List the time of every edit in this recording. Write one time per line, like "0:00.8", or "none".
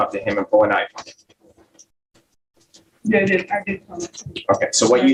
none